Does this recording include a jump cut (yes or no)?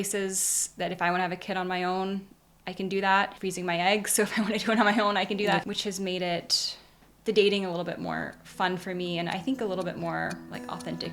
yes